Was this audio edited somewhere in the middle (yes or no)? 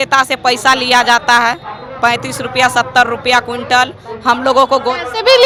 no